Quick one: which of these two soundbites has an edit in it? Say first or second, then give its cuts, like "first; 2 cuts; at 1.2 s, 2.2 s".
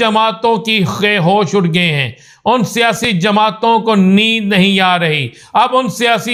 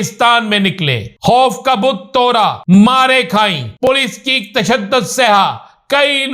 second; 3 cuts; at 1.0 s, 2.6 s, 3.9 s